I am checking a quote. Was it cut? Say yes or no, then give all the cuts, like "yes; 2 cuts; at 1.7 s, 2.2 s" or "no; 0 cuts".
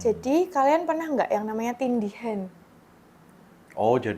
no; 0 cuts